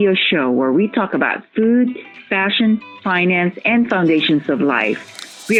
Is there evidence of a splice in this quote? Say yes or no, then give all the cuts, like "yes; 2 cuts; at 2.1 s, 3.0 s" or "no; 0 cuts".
no; 0 cuts